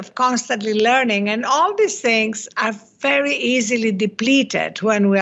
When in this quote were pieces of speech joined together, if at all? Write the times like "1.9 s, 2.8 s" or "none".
none

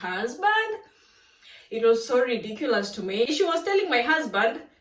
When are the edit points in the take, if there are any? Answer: 3.3 s

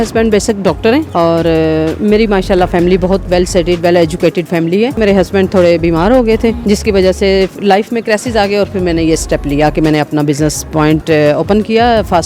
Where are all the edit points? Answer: 1.1 s, 4.9 s, 6.6 s

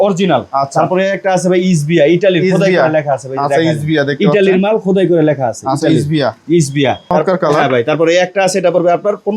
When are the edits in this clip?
7.0 s

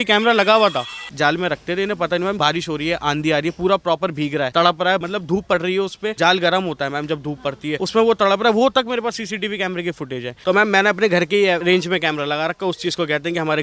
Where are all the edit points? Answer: 1.0 s, 2.4 s, 4.5 s, 5.1 s, 6.1 s, 7.8 s, 10.3 s, 11.6 s

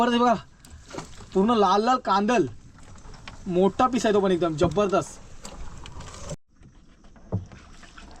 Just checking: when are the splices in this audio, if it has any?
6.4 s

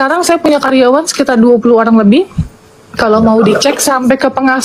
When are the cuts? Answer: none

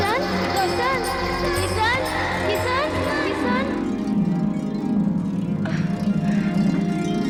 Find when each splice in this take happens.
none

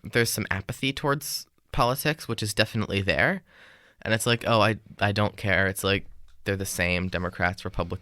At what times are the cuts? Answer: none

